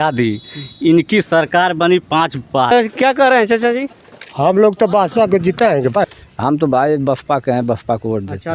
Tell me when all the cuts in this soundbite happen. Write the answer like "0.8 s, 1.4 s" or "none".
2.7 s, 6.2 s